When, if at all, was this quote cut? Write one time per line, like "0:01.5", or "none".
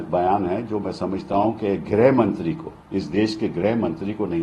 none